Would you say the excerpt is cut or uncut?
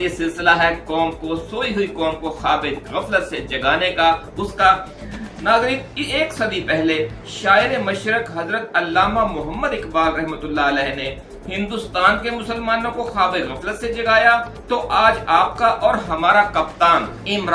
uncut